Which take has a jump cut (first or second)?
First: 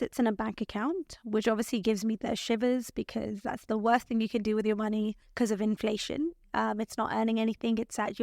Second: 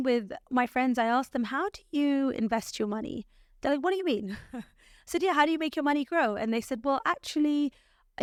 first